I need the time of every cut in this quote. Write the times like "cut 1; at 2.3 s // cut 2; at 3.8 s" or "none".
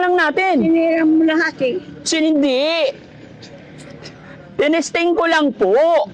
none

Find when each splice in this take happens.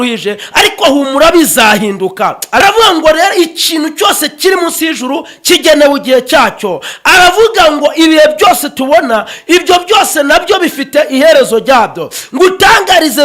cut 1; at 2.6 s

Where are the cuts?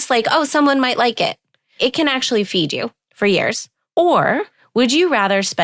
cut 1; at 1.7 s // cut 2; at 3.0 s // cut 3; at 3.7 s // cut 4; at 4.6 s

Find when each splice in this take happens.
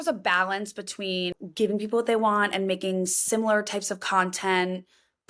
cut 1; at 1.3 s

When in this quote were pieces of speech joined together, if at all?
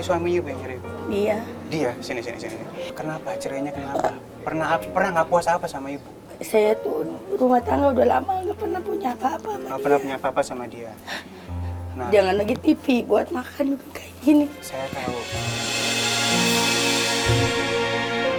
none

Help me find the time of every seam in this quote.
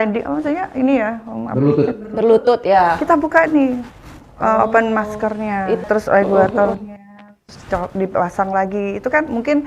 cut 1; at 5.8 s

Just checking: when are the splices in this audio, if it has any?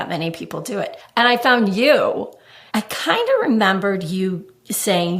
cut 1; at 1.0 s // cut 2; at 2.7 s

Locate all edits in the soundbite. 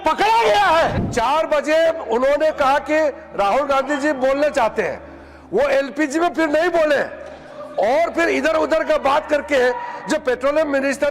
cut 1; at 1.0 s

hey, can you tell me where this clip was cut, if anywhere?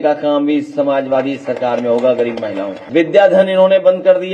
none

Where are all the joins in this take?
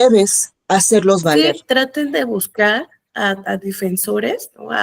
cut 1; at 1.5 s

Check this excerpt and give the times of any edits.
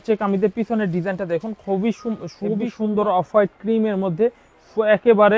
cut 1; at 2.7 s

